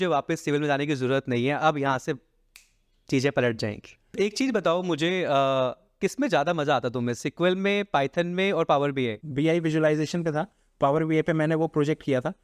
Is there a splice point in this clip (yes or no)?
yes